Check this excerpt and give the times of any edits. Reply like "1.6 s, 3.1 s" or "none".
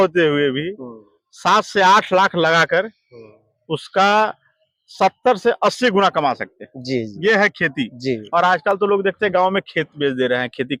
none